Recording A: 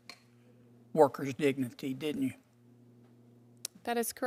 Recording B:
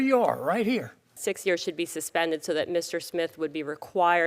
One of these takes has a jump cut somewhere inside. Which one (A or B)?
B